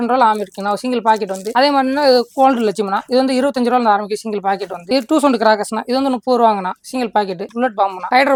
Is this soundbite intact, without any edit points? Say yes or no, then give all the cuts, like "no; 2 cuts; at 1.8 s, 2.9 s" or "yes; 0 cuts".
yes; 0 cuts